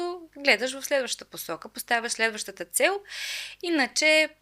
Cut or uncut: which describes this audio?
uncut